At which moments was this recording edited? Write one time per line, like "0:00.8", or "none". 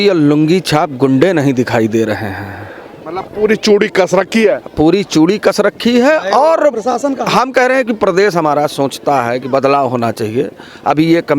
none